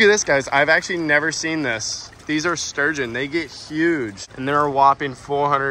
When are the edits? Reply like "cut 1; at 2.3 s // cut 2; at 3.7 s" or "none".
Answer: none